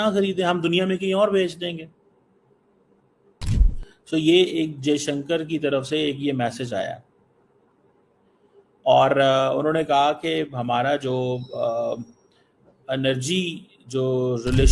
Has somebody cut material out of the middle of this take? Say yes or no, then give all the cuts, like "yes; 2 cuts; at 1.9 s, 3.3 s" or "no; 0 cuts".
no; 0 cuts